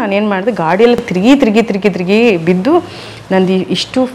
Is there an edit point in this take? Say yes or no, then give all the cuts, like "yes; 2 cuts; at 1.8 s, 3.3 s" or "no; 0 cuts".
no; 0 cuts